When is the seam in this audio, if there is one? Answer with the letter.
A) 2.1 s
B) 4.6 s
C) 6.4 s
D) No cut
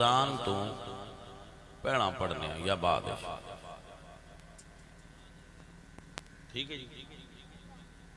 D